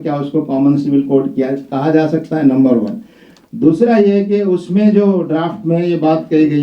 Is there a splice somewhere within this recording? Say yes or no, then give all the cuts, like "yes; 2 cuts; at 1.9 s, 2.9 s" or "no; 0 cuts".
no; 0 cuts